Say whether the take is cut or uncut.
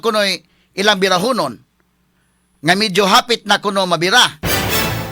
uncut